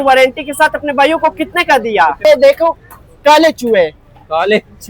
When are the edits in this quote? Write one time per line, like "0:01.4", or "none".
0:02.2